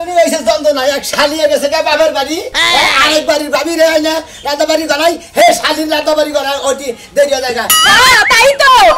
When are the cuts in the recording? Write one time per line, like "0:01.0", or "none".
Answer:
0:07.8